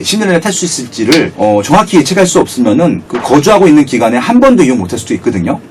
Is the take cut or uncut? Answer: cut